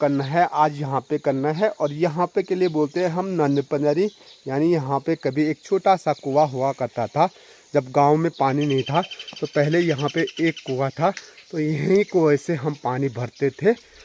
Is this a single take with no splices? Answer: yes; 0 cuts

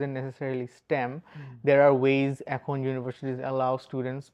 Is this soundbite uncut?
yes; 0 cuts

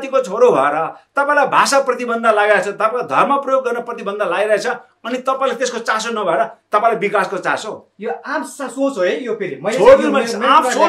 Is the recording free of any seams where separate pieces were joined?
yes; 0 cuts

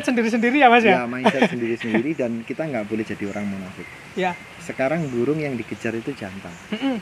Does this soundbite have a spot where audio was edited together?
no; 0 cuts

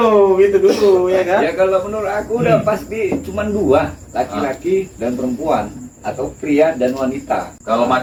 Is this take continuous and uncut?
yes; 0 cuts

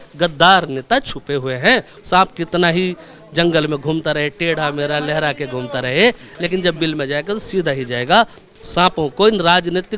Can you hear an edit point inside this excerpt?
yes; 1 cut; at 1.9 s

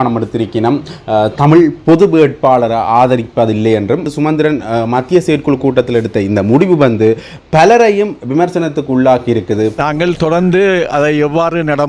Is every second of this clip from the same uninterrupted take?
no; 2 cuts; at 4.1 s, 9.7 s

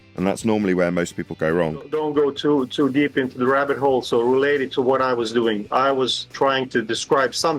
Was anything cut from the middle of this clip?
yes; 1 cut; at 1.9 s

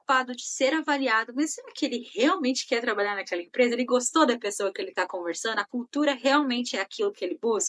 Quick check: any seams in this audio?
no; 0 cuts

